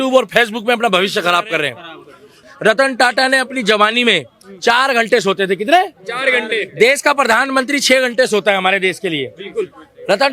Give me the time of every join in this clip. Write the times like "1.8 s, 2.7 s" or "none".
2.4 s